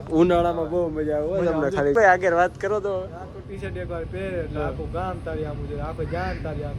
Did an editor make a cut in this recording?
yes; 1 cut; at 1.9 s

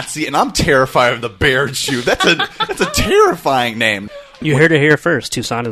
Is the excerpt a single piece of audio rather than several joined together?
no; 1 cut; at 4.3 s

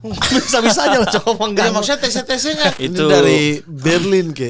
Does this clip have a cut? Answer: yes; 1 cut; at 2.7 s

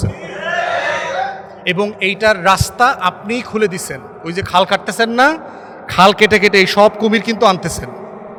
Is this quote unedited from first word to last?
yes; 0 cuts

